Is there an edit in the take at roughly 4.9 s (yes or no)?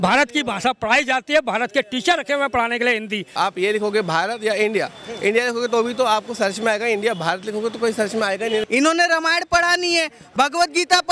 no